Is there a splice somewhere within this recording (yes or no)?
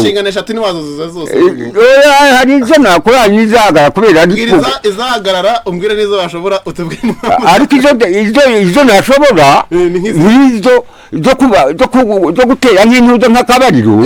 no